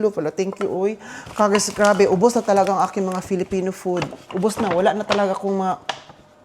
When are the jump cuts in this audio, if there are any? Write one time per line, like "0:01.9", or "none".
none